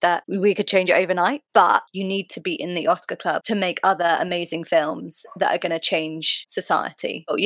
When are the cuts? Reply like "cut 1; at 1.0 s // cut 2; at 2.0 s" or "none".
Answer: cut 1; at 1.5 s